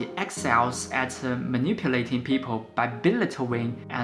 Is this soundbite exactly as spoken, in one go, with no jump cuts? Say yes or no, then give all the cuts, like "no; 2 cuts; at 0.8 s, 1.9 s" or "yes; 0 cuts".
yes; 0 cuts